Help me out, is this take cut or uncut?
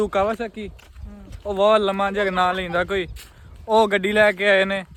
uncut